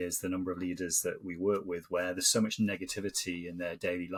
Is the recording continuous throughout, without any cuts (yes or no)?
yes